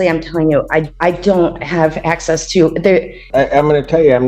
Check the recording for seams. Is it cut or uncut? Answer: cut